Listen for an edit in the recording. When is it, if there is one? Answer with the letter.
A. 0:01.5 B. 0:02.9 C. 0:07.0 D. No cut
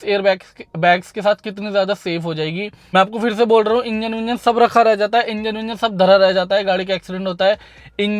B